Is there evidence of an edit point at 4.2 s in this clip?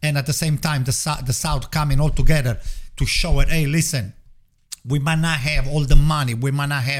no; 0 cuts

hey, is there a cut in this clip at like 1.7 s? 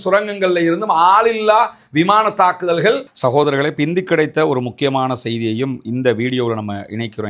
no; 1 cut; at 3.0 s

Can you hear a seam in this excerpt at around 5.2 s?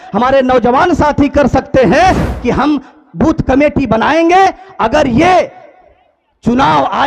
no; 1 cut; at 2.3 s

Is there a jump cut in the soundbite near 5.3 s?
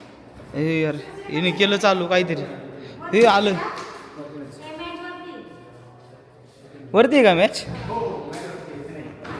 no; 0 cuts

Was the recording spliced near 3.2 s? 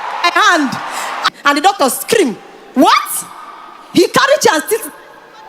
no; 1 cut; at 1.3 s

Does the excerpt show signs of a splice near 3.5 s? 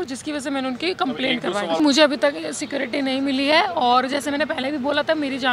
no; 1 cut; at 1.8 s

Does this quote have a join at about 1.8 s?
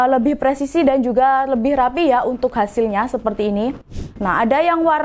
no; 1 cut; at 3.9 s

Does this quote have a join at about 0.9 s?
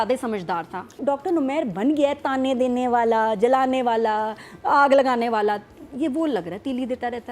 yes; 1 cut; at 0.9 s

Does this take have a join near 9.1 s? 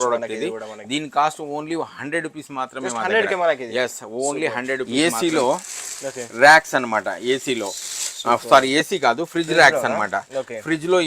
no; 1 cut; at 4.9 s

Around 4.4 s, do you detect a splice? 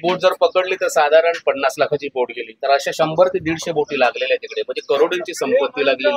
no; 0 cuts

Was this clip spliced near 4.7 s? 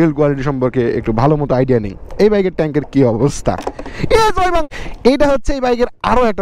yes; 1 cut; at 4.7 s

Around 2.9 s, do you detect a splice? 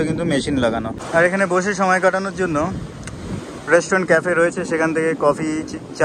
no; 1 cut; at 1.0 s

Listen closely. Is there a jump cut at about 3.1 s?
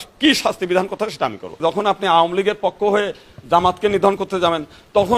no; 1 cut; at 1.5 s

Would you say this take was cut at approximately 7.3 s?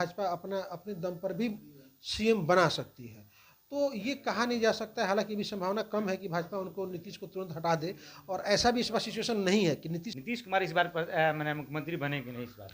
no; 1 cut; at 10.1 s

